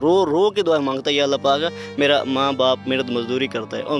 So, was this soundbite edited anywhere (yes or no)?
no